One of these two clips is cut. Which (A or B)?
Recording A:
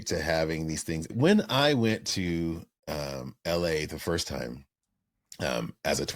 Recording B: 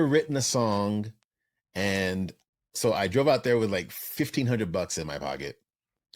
A